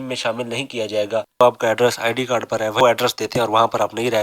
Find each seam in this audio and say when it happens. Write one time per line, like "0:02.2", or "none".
0:01.4
0:02.8